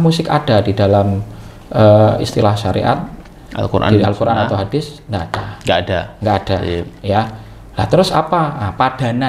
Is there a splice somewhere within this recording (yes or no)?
no